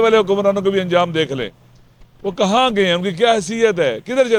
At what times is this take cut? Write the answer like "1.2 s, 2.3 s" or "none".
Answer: none